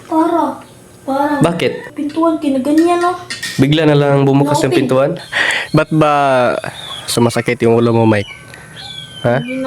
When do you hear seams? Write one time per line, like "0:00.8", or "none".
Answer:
0:02.0
0:05.2